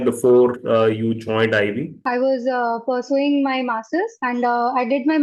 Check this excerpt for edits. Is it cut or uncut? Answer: uncut